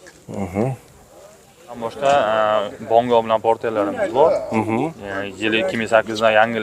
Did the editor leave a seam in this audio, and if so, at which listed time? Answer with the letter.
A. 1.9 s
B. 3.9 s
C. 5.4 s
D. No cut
A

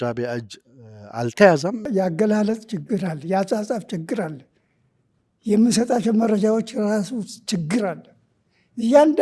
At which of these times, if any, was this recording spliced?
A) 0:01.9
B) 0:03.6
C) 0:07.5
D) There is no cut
A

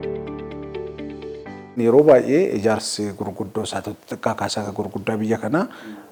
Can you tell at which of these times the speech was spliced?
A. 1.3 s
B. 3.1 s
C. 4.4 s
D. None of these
D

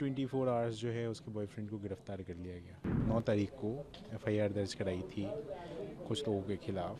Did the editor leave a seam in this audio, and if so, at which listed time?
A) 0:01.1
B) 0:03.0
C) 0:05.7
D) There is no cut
B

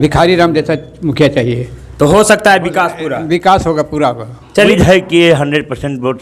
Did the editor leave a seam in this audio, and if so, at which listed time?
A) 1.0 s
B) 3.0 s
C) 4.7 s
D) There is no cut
C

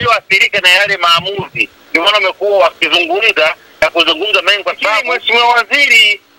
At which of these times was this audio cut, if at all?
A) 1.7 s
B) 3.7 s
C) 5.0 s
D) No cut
C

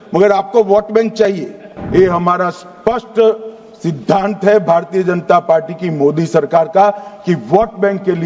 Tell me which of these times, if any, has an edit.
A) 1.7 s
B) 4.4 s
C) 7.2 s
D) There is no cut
A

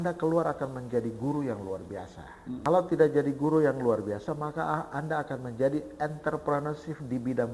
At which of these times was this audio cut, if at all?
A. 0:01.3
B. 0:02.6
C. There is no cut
B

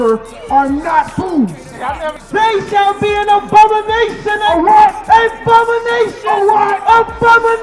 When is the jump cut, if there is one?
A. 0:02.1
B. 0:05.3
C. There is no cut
A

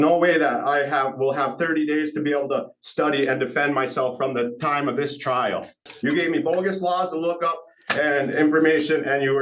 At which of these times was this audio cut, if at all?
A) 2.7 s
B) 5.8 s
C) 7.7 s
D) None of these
B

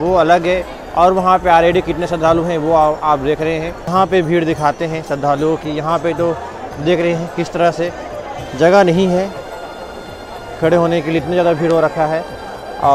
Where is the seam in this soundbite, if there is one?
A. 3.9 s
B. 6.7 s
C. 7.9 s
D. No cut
A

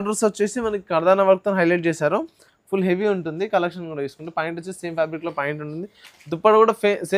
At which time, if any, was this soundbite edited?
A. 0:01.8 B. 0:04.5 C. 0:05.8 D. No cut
D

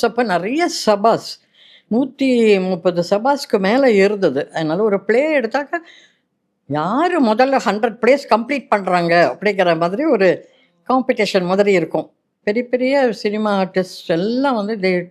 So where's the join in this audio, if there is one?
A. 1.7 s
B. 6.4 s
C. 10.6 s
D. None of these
D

